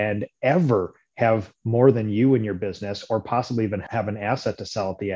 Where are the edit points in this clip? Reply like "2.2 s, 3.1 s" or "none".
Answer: 3.9 s